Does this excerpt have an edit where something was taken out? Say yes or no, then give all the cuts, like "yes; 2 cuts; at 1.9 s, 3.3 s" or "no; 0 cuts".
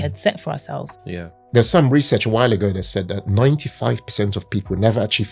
yes; 1 cut; at 1.4 s